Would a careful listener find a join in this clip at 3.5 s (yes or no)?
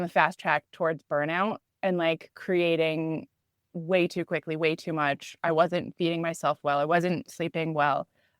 no